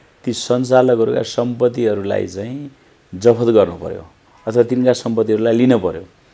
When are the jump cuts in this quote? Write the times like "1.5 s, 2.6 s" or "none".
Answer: none